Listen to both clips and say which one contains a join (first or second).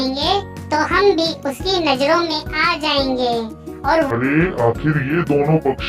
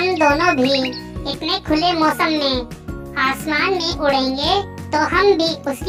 first